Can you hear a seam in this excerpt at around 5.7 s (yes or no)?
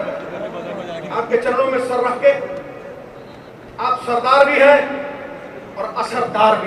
no